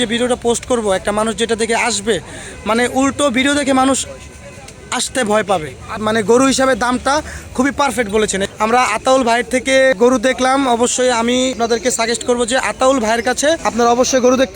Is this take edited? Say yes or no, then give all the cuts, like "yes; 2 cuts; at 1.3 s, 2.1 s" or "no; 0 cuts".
yes; 5 cuts; at 6.0 s, 8.5 s, 10.0 s, 11.6 s, 13.6 s